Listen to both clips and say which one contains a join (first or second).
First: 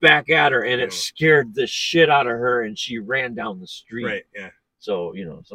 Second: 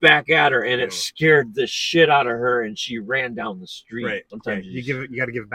second